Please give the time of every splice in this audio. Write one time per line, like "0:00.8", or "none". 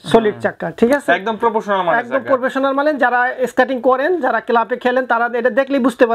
none